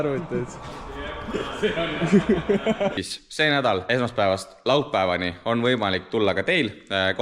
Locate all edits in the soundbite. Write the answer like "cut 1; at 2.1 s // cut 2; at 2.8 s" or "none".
cut 1; at 2.9 s // cut 2; at 3.8 s